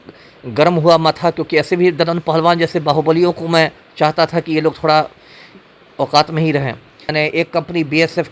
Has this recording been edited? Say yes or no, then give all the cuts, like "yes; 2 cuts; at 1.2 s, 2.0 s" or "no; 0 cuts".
yes; 1 cut; at 7.1 s